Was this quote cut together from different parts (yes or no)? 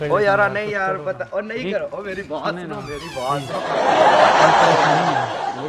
no